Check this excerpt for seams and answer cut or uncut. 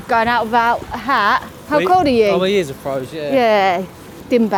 uncut